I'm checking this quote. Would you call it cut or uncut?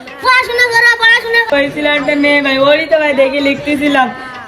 cut